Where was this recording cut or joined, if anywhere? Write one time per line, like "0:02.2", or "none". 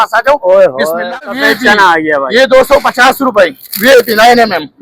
0:01.3